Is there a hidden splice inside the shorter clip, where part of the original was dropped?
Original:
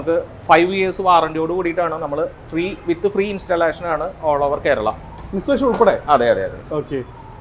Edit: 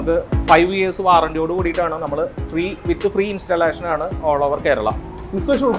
no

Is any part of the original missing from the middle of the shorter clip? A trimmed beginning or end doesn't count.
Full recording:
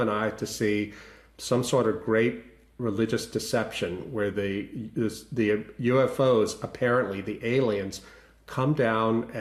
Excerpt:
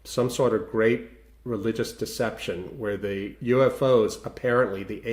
yes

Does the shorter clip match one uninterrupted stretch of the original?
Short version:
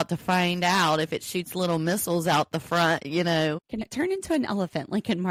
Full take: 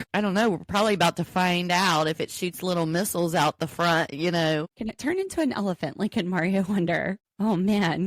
yes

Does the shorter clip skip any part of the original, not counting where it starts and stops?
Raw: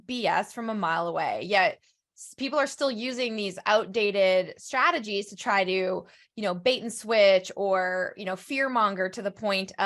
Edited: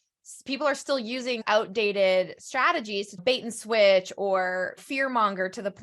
yes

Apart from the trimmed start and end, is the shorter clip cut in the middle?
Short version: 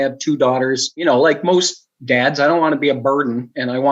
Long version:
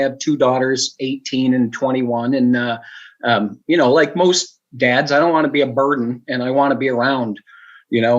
yes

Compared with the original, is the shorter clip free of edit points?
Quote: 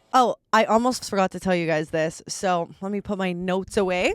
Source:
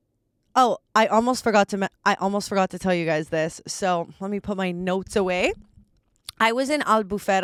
no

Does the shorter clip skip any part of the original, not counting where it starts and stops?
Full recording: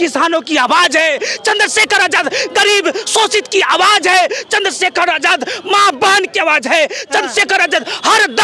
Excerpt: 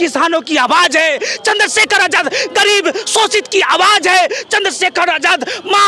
no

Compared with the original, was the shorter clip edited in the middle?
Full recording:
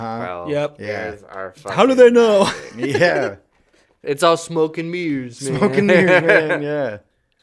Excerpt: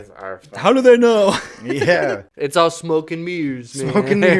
yes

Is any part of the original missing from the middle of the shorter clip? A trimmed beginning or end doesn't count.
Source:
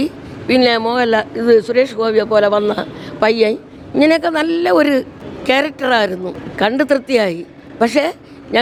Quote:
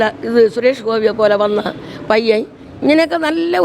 no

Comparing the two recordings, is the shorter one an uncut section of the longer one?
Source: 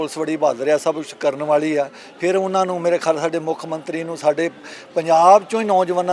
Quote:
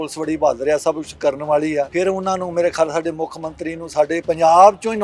no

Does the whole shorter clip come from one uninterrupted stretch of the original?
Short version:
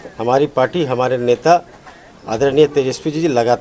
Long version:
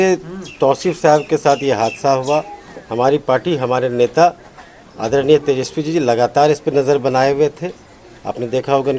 yes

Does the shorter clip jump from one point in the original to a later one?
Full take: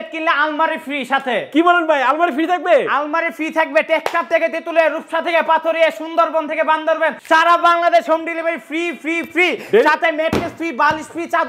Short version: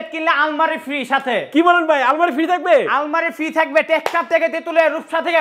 no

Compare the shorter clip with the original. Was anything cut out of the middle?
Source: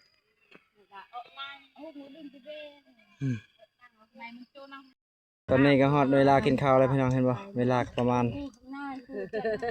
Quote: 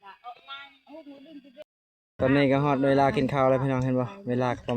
yes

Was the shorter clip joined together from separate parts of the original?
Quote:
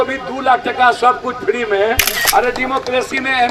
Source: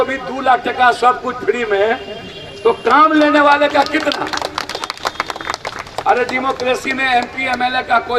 yes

